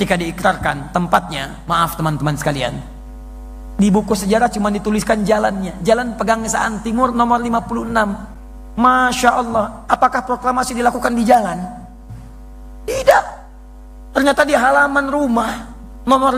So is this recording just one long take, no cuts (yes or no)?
yes